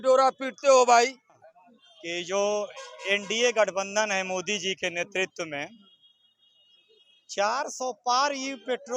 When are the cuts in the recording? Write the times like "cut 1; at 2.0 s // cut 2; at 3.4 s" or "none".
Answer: cut 1; at 1.5 s